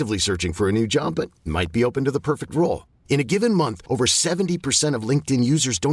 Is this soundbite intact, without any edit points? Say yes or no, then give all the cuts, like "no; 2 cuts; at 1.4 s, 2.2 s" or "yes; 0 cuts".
yes; 0 cuts